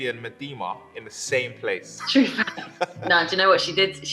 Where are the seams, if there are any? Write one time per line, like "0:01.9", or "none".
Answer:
0:01.9
0:03.0